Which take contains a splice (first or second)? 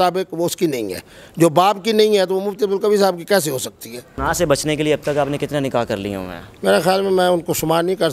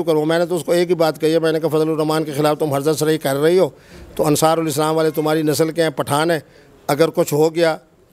first